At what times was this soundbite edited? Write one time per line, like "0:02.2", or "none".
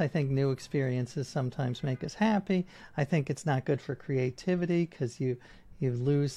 none